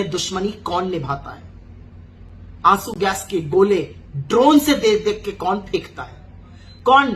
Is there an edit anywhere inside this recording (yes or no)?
no